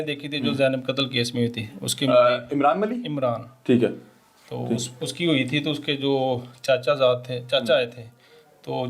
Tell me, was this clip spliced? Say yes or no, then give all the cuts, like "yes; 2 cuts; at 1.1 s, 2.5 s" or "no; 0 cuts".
no; 0 cuts